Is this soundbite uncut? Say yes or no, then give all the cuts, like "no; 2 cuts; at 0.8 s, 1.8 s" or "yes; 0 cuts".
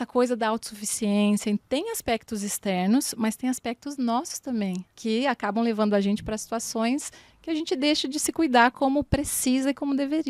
no; 2 cuts; at 1.6 s, 4.9 s